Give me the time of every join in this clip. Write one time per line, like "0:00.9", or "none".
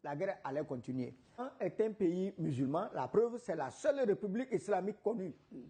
0:01.5